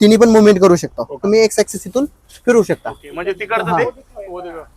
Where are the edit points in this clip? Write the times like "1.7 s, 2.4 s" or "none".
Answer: 1.1 s